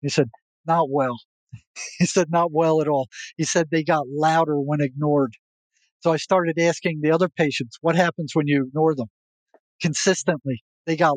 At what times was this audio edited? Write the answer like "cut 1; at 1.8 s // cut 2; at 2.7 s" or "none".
none